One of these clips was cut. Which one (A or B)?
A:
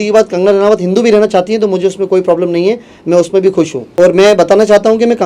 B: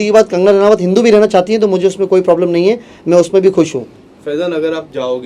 A